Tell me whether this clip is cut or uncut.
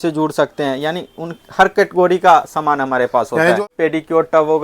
cut